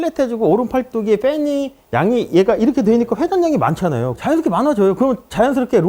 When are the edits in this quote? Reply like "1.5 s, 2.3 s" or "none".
none